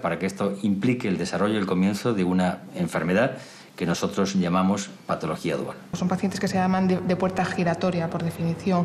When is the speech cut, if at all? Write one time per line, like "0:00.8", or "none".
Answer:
0:05.9